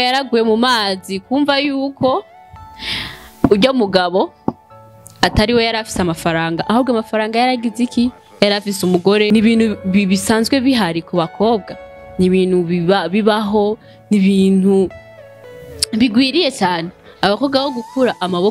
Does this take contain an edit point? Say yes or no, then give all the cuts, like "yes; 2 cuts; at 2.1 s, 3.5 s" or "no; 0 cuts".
yes; 1 cut; at 9.3 s